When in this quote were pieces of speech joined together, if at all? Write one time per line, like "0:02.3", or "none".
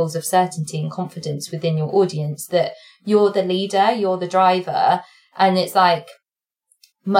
none